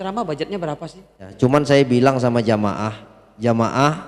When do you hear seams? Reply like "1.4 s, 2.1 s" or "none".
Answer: 1.3 s

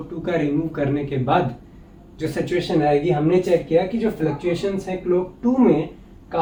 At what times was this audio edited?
none

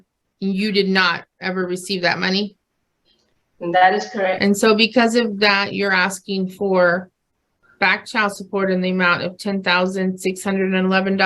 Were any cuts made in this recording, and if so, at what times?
4.4 s

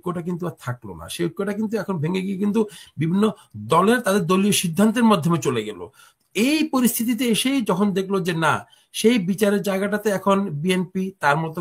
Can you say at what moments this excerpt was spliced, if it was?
none

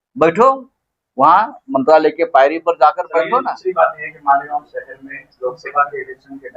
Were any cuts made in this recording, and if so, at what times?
3.5 s

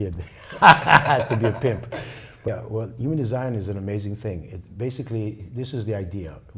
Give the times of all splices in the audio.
2.5 s

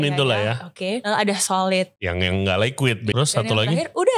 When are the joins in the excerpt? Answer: 1.0 s, 2.0 s, 3.1 s

